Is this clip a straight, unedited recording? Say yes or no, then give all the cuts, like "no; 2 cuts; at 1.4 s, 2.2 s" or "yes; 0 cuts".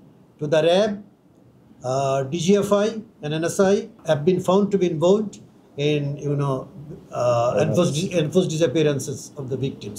no; 1 cut; at 3.9 s